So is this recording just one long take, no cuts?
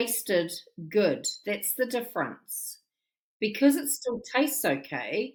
yes; 0 cuts

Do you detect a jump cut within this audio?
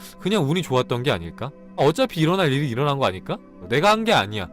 yes; 2 cuts; at 1.8 s, 3.5 s

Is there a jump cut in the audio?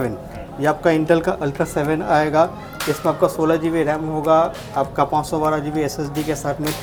no; 0 cuts

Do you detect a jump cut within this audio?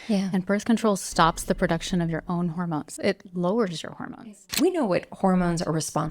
yes; 2 cuts; at 2.9 s, 4.4 s

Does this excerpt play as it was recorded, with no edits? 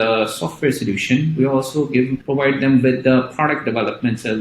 no; 1 cut; at 2.2 s

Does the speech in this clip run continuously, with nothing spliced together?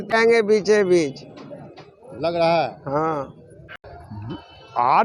yes; 0 cuts

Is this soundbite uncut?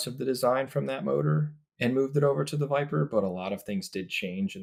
yes; 0 cuts

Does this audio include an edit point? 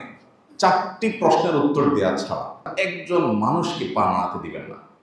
yes; 1 cut; at 2.7 s

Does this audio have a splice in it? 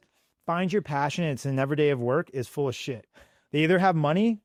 no; 0 cuts

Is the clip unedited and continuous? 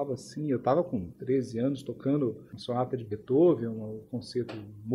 no; 2 cuts; at 1.1 s, 2.5 s

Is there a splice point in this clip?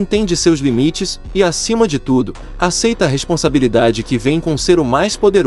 no; 0 cuts

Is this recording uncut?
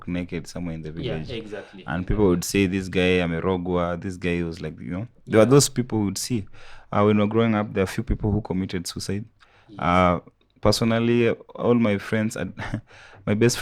yes; 0 cuts

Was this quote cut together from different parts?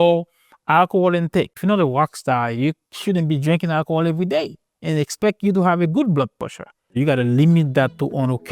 yes; 2 cuts; at 1.6 s, 6.9 s

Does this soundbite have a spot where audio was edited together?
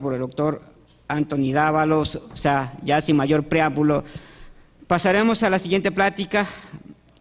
yes; 1 cut; at 1.9 s

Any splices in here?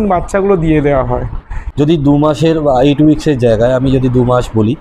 yes; 1 cut; at 1.5 s

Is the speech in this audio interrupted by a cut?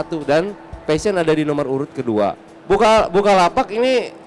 yes; 1 cut; at 2.5 s

